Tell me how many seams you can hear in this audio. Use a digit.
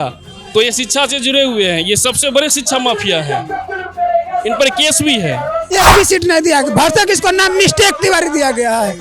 1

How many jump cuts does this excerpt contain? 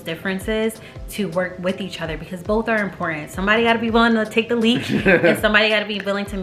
0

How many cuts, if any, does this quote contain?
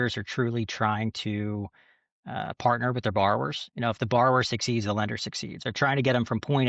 1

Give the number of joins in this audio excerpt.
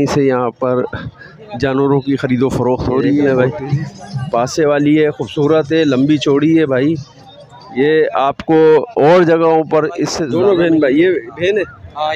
2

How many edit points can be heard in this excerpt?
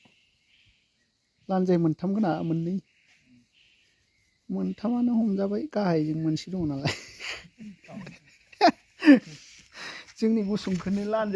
1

